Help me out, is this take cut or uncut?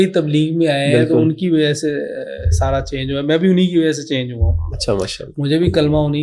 uncut